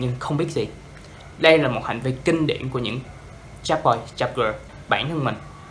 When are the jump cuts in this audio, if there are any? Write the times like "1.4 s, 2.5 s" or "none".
4.7 s

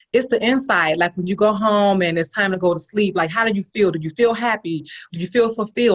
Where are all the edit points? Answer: 5.0 s

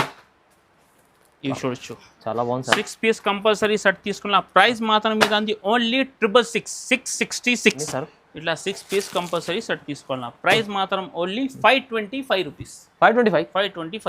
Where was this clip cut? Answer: 7.8 s

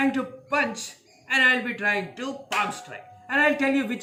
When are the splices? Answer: none

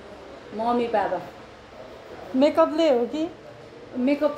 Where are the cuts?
none

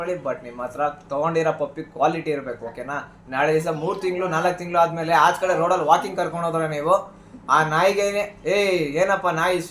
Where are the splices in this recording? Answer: none

